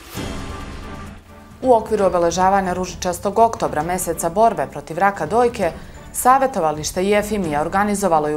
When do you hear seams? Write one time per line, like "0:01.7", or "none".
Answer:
0:01.3